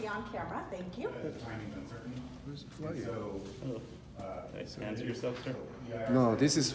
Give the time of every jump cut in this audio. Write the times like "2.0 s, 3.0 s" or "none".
1.2 s